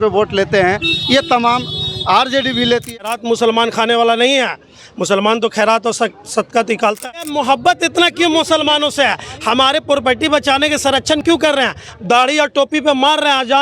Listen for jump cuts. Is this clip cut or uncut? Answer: cut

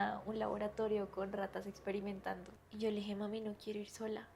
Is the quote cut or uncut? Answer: cut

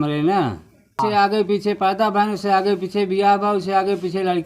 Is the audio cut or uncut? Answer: cut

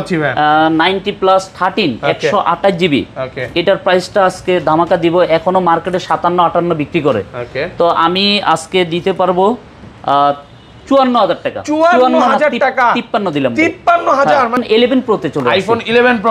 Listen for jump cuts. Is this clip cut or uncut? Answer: cut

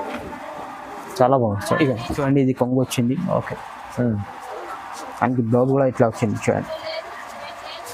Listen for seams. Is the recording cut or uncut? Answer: cut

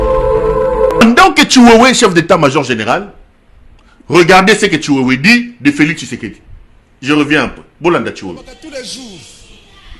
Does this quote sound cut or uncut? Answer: cut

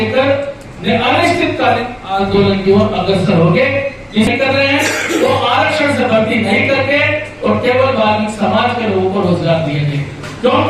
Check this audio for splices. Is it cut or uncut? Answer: cut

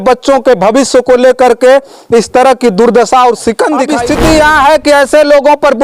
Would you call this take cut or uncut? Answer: cut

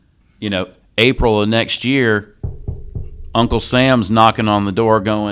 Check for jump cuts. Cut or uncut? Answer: uncut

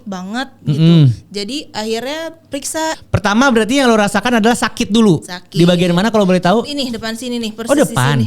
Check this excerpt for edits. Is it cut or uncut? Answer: cut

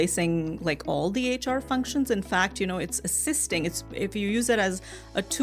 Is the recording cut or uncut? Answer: uncut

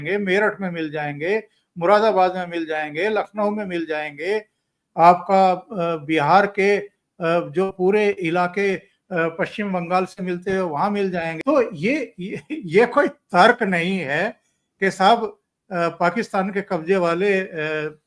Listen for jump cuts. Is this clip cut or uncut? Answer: cut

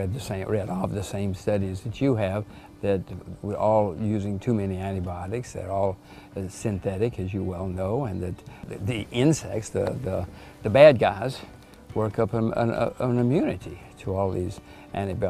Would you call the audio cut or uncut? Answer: uncut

